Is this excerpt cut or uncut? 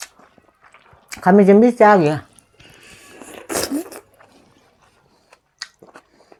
uncut